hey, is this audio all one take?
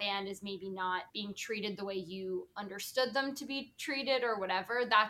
no; 1 cut; at 1.1 s

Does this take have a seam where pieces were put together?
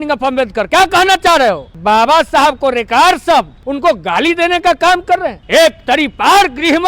yes; 3 cuts; at 1.8 s, 3.6 s, 5.4 s

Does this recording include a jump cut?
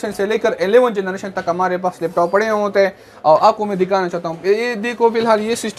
no; 0 cuts

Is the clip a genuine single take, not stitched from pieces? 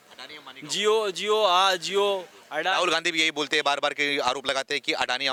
yes; 0 cuts

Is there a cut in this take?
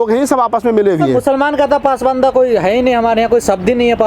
no; 0 cuts

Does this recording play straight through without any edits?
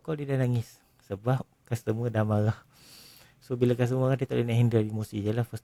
yes; 0 cuts

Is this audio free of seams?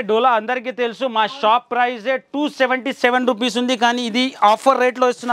yes; 0 cuts

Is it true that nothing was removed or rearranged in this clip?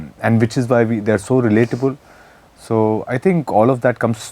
yes; 0 cuts

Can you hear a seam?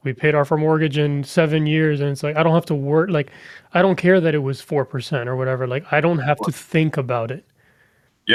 no; 0 cuts

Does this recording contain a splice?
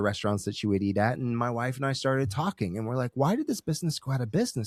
no; 0 cuts

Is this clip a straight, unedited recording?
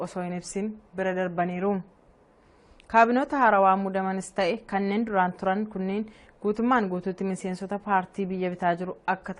no; 1 cut; at 7.5 s

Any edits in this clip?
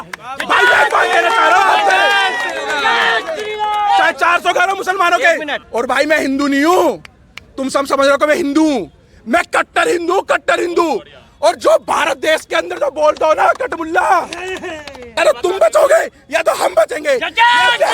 yes; 2 cuts; at 5.6 s, 15.2 s

